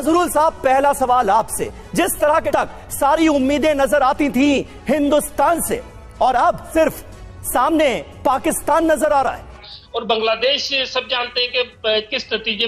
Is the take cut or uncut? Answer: cut